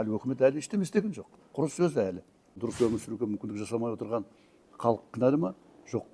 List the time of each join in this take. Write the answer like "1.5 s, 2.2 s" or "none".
2.6 s